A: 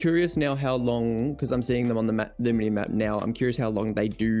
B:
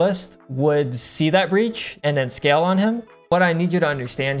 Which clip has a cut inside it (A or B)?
B